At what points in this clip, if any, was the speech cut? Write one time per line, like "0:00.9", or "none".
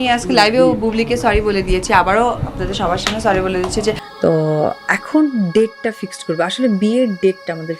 0:04.1